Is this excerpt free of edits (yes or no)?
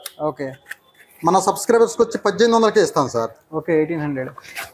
yes